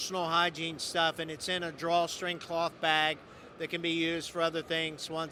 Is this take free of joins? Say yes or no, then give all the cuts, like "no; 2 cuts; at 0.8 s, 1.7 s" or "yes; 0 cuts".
yes; 0 cuts